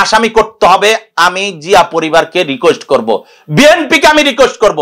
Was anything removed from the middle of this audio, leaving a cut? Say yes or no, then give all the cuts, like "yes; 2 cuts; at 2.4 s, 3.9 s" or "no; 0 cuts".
no; 0 cuts